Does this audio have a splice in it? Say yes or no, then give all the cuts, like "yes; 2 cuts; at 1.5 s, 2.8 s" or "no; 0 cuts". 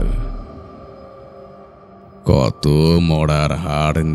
no; 0 cuts